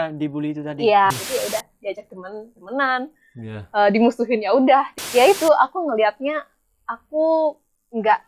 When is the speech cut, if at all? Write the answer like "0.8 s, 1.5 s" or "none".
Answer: 1.1 s, 5.0 s